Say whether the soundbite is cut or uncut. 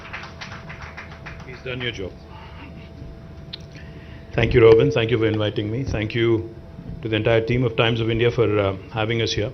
cut